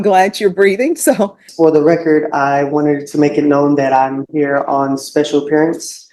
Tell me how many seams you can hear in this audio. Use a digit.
1